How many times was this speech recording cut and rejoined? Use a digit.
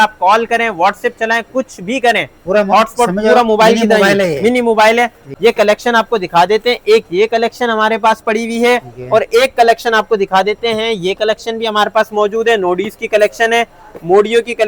1